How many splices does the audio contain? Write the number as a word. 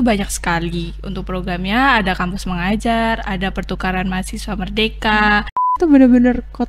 one